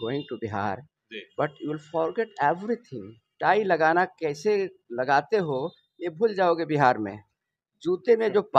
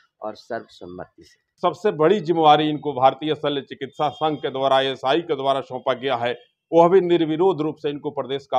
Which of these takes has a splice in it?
second; 1 cut; at 1.5 s

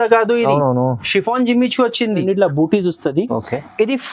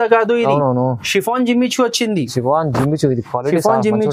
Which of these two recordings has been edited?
first; 1 cut; at 2.2 s

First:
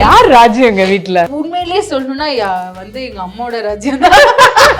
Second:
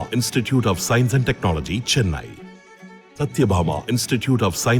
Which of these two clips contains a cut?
first; 1 cut; at 1.3 s

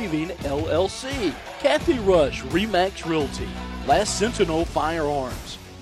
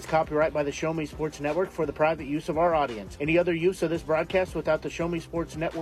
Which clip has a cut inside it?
first; 1 cut; at 1.5 s

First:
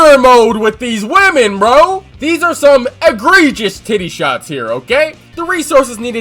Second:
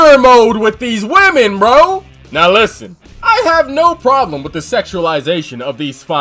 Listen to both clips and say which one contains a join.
first; 2 cuts; at 2.1 s, 5.3 s

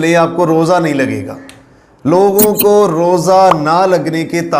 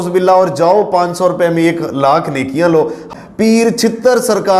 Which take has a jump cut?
second; 1 cut; at 3.0 s

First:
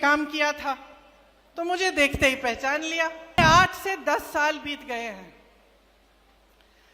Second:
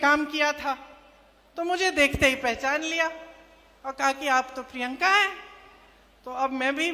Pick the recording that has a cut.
first; 1 cut; at 3.4 s

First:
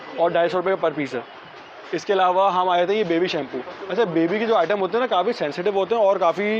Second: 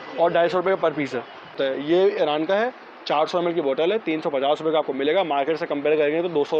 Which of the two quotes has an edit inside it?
second; 1 cut; at 1.6 s

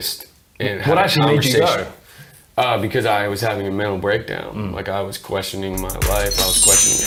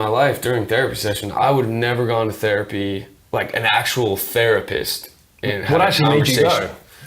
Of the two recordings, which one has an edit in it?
second; 2 cuts; at 1.3 s, 3.1 s

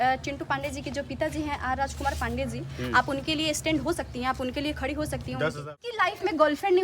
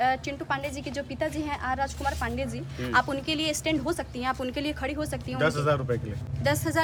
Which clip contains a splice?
first; 1 cut; at 5.8 s

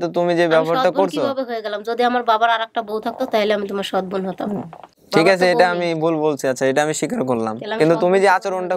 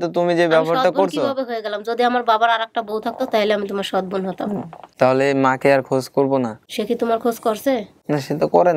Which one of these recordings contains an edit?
second; 3 cuts; at 4.8 s, 6.6 s, 7.9 s

